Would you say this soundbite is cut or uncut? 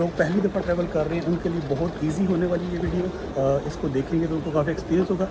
uncut